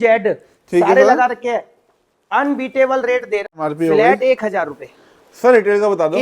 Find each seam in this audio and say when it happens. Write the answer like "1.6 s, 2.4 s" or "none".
3.5 s